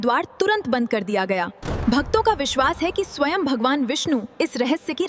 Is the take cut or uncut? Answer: uncut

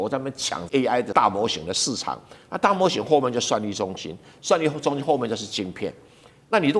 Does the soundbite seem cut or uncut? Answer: cut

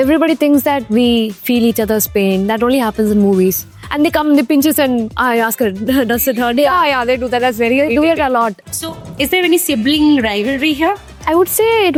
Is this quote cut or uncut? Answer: uncut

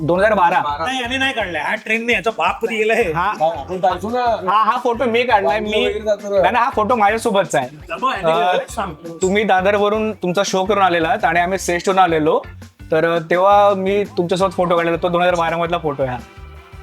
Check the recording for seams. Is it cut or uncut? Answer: uncut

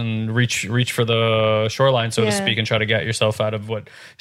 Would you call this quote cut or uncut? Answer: uncut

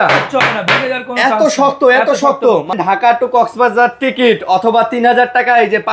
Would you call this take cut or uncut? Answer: cut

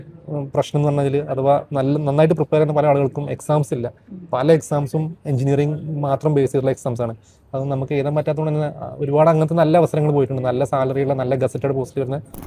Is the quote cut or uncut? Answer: uncut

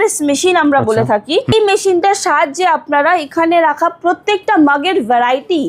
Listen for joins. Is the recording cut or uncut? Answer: cut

